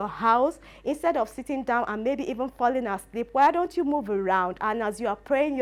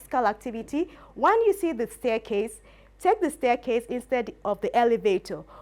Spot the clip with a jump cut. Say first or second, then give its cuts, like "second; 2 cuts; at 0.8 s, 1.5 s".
second; 1 cut; at 1.0 s